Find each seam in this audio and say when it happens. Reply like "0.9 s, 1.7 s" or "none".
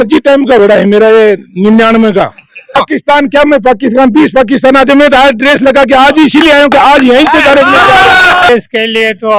2.8 s, 8.5 s